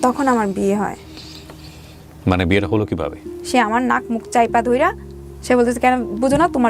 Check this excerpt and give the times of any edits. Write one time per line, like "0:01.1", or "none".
0:03.2